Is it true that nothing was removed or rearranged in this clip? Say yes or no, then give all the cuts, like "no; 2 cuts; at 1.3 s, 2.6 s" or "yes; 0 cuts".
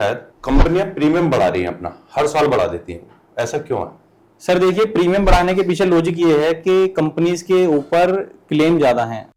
yes; 0 cuts